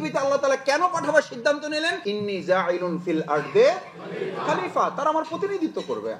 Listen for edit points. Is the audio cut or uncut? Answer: cut